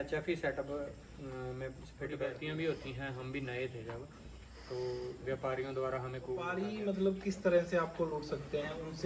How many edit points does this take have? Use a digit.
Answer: 2